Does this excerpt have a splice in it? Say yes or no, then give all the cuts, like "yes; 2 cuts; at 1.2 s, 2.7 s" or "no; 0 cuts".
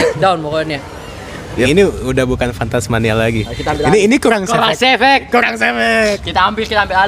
yes; 1 cut; at 1.5 s